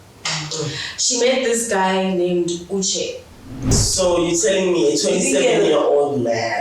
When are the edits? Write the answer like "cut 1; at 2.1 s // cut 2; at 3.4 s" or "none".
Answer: cut 1; at 3.8 s